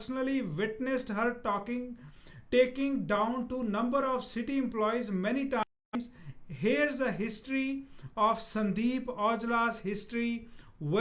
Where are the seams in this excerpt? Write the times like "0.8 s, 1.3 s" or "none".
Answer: none

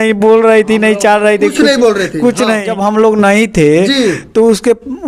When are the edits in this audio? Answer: 2.7 s

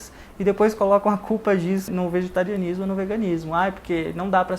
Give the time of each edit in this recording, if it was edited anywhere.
1.9 s

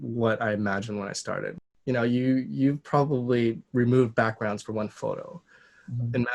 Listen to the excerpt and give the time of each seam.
1.6 s

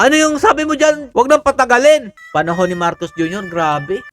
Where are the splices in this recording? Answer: 2.1 s

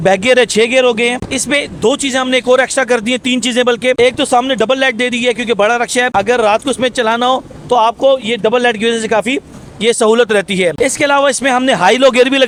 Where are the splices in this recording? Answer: none

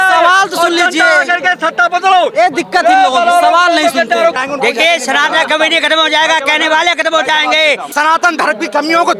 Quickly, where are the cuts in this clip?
4.4 s, 7.9 s

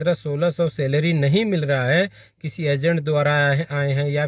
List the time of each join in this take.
none

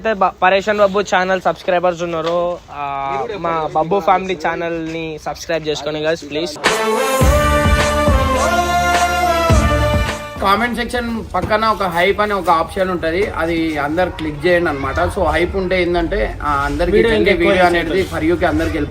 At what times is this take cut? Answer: 10.3 s

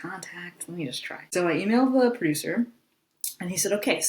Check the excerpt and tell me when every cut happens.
1.1 s

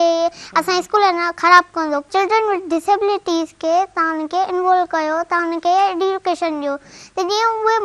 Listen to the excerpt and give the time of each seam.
2.1 s

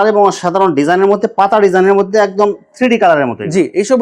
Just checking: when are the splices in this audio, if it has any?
none

